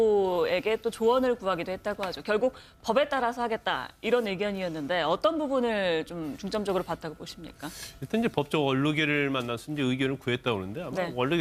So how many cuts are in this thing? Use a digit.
1